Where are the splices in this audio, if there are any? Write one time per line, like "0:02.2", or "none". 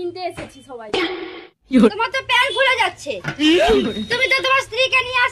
0:01.9